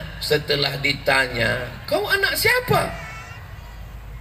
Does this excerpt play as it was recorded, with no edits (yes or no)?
yes